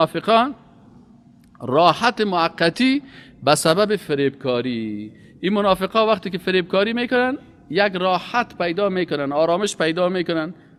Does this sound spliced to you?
no; 0 cuts

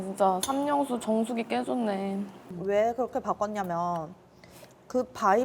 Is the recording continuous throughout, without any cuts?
no; 1 cut; at 2.4 s

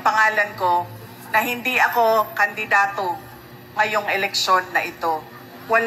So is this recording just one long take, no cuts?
yes; 0 cuts

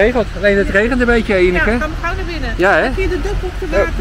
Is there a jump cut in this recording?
no; 0 cuts

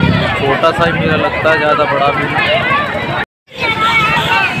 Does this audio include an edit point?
no; 0 cuts

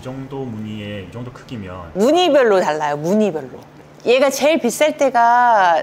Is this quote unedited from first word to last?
yes; 0 cuts

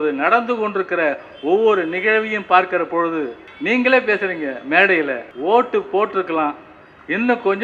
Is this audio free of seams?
no; 2 cuts; at 3.5 s, 5.3 s

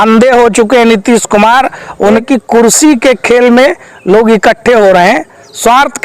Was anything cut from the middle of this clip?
yes; 1 cut; at 2.2 s

